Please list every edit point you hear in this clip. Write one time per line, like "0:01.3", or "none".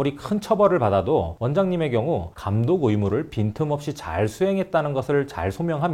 none